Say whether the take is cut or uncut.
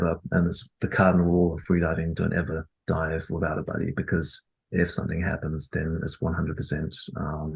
uncut